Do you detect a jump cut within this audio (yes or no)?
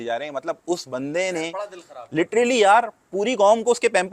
no